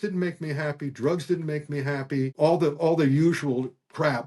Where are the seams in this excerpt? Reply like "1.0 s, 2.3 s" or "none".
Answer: 2.3 s